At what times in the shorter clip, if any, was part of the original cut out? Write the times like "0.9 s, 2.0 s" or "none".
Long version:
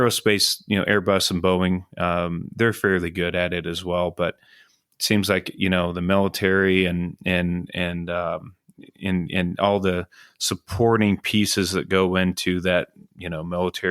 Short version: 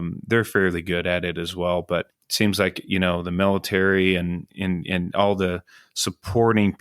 2.2 s, 4.4 s